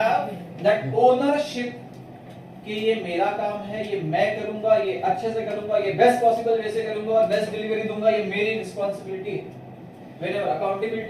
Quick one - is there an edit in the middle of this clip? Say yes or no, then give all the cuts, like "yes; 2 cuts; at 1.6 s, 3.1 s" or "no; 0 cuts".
no; 0 cuts